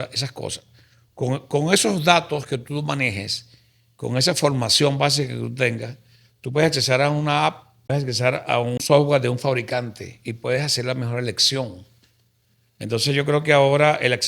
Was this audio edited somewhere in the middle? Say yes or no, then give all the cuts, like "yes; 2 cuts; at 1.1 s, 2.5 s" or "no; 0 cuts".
yes; 2 cuts; at 7.9 s, 8.8 s